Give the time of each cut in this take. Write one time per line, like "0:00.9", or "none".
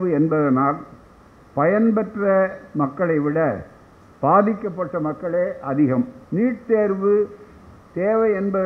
0:06.2